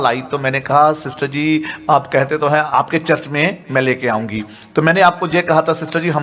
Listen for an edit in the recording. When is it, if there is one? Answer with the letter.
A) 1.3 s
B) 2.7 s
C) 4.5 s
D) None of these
B